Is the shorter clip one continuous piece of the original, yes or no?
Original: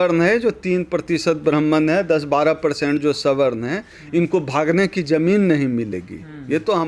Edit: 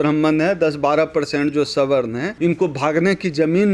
no